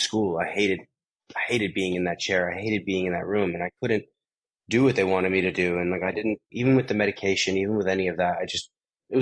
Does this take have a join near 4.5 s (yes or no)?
no